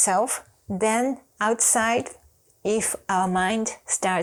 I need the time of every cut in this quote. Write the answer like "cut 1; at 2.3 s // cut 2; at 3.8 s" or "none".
none